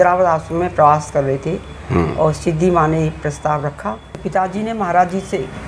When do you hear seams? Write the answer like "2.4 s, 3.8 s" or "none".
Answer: 4.1 s